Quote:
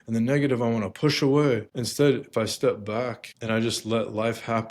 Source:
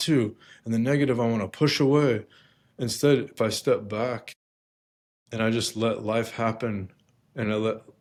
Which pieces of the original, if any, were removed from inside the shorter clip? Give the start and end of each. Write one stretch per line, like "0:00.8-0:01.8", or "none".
0:02.3-0:02.8
0:04.3-0:05.2

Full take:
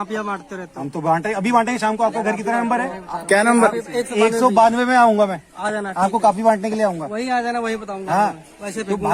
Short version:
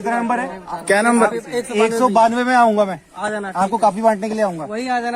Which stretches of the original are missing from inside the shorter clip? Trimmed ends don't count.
none

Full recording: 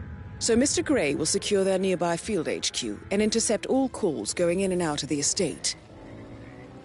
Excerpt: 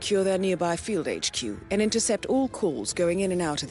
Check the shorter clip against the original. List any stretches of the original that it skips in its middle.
none

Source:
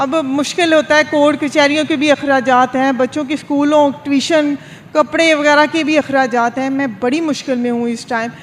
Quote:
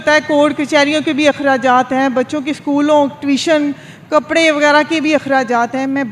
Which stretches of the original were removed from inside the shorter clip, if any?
none

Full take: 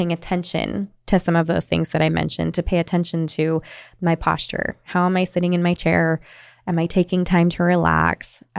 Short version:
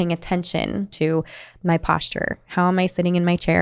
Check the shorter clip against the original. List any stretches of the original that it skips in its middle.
0:00.9-0:03.3

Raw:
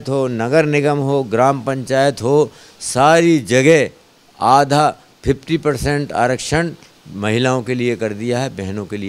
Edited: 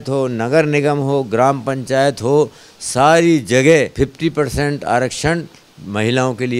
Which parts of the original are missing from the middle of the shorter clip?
0:03.9-0:05.2

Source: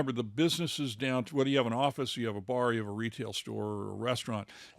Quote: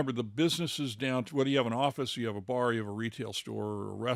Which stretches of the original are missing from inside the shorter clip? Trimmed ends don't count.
none

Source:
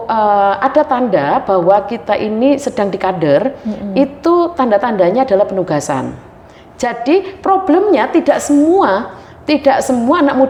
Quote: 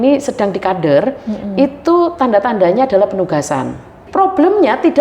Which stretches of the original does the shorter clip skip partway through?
0:06.4-0:07.3

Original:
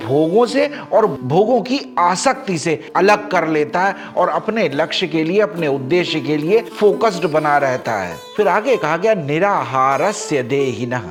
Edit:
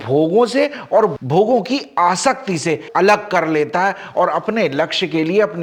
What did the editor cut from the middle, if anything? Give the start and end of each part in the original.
none

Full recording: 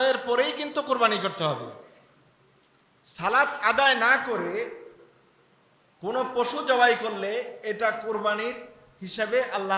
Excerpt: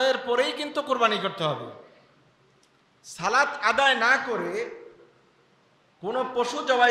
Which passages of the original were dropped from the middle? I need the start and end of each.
none

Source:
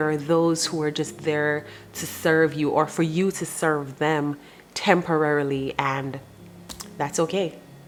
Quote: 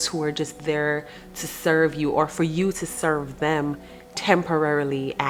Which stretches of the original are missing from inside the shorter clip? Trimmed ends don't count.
none

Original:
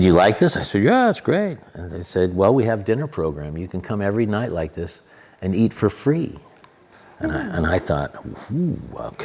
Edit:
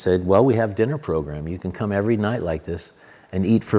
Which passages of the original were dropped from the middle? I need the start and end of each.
none

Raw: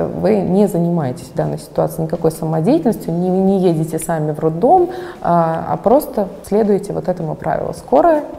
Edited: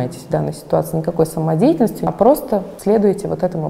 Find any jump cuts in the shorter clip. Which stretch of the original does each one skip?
0:03.1-0:05.7

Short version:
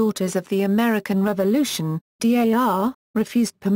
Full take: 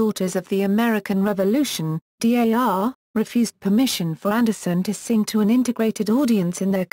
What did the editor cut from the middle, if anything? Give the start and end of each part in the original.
none

